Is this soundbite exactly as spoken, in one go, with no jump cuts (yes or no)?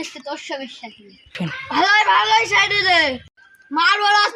no